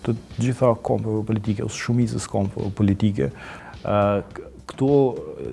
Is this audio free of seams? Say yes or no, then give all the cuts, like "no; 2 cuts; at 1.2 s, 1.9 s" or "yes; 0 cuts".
no; 1 cut; at 3.5 s